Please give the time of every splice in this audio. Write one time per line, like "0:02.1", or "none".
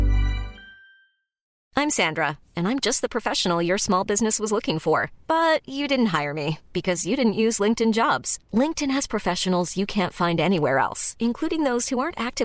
0:01.5